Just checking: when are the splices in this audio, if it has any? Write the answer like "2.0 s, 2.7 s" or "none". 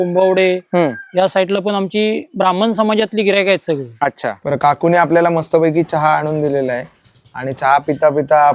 4.4 s